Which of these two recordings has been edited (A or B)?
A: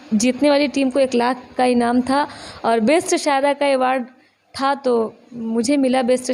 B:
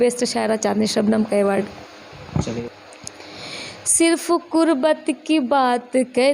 B